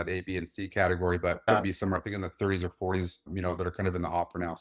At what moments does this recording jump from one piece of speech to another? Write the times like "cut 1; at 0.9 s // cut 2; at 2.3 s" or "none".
cut 1; at 1.4 s